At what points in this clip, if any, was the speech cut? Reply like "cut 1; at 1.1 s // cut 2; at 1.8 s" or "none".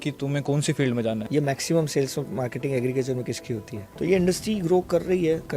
cut 1; at 1.2 s // cut 2; at 3.8 s